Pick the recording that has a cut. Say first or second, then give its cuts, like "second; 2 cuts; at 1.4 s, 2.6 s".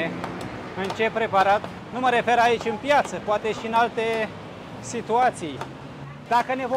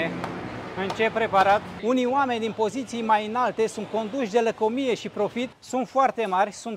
second; 2 cuts; at 1.8 s, 5.6 s